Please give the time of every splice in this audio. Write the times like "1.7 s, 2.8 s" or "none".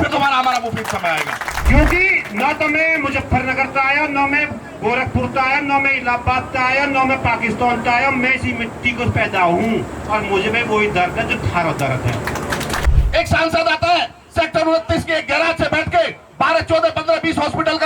1.6 s, 12.9 s